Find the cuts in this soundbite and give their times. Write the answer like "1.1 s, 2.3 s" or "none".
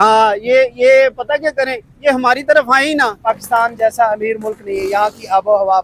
3.2 s